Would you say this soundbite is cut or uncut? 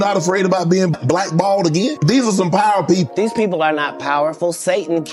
uncut